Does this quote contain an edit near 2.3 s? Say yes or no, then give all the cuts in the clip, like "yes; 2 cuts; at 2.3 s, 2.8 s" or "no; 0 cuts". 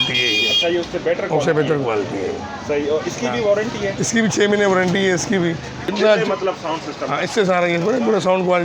no; 1 cut; at 5.9 s